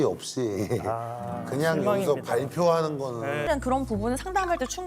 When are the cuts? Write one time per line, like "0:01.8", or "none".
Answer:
0:03.5